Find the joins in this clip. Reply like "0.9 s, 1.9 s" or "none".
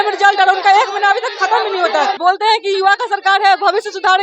2.2 s